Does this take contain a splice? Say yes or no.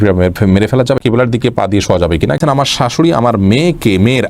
yes